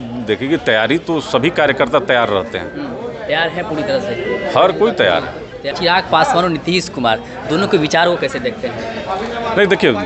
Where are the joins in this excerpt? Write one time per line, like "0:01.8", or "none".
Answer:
0:05.7